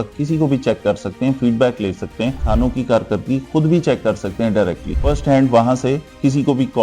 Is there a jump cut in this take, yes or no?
yes